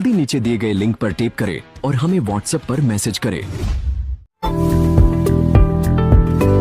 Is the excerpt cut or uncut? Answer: cut